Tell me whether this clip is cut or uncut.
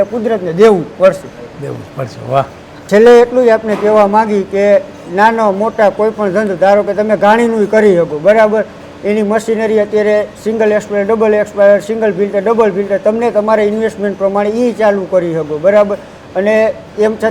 uncut